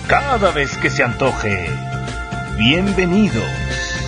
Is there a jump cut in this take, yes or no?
no